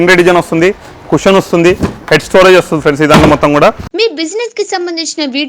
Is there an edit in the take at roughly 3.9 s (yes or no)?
yes